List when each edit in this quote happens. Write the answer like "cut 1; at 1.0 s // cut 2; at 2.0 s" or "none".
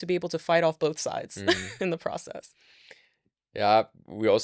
none

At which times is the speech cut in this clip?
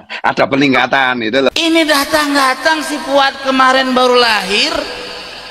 cut 1; at 1.5 s

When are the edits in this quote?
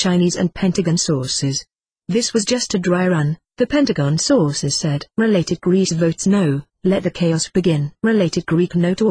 none

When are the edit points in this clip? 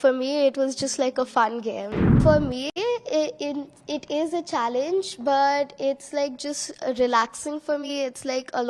cut 1; at 2.1 s

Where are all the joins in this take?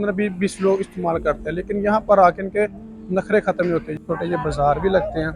cut 1; at 4.0 s

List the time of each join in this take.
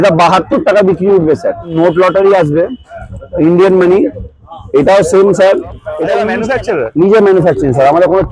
cut 1; at 1.7 s // cut 2; at 6.3 s

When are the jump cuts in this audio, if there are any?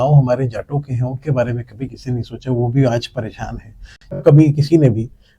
cut 1; at 4.2 s

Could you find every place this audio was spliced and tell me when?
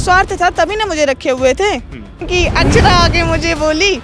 cut 1; at 2.3 s

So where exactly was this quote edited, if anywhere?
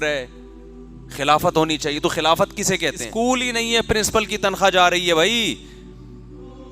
cut 1; at 3.0 s

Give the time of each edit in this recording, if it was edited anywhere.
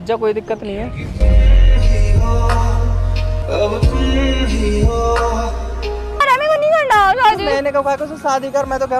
cut 1; at 6.2 s

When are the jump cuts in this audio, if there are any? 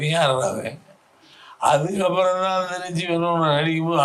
none

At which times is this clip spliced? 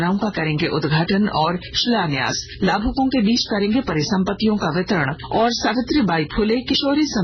cut 1; at 1.9 s // cut 2; at 5.1 s

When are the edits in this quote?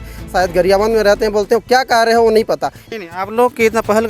cut 1; at 3.0 s

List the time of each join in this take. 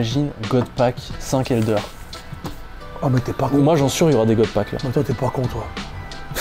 none

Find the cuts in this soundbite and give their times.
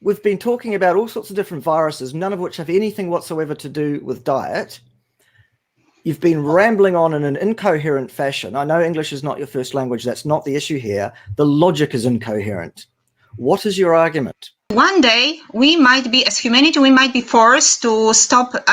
cut 1; at 14.7 s

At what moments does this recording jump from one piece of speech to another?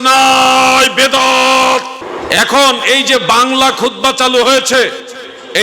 cut 1; at 1.9 s

